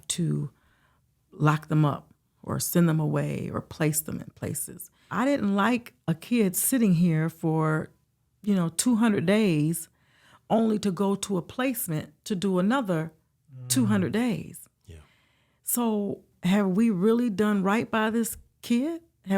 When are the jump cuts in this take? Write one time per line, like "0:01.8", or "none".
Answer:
0:05.1
0:16.3